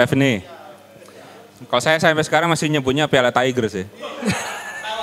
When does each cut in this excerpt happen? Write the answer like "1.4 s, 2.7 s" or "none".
none